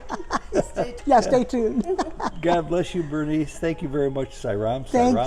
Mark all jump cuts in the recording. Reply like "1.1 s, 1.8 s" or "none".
1.0 s

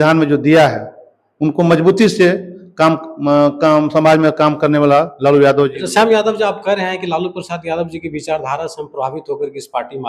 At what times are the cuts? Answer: none

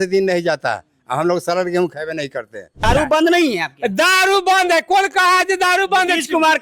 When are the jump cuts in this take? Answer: 2.8 s

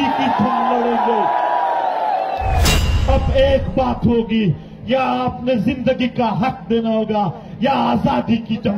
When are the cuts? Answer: 2.9 s

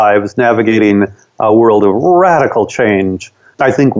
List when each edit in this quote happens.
none

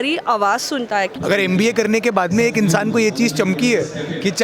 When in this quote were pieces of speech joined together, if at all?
1.1 s

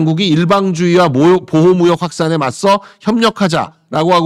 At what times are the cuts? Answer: none

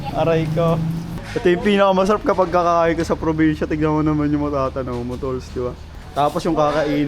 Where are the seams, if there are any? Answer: 1.1 s, 5.9 s

